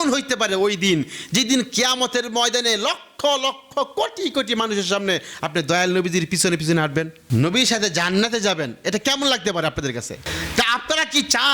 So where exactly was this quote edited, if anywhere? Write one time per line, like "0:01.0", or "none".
0:07.2